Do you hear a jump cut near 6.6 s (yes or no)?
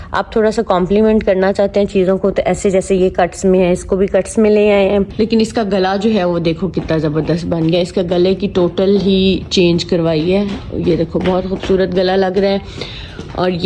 no